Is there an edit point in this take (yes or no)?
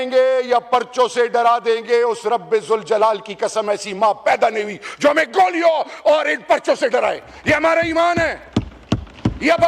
no